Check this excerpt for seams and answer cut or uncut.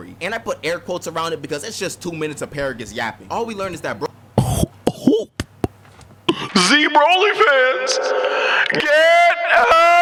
uncut